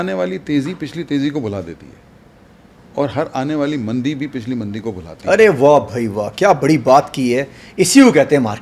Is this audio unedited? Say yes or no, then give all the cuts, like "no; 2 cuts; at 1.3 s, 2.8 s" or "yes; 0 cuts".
yes; 0 cuts